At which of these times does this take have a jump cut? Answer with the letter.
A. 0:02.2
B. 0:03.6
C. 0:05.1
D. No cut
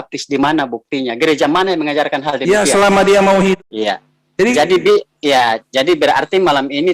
B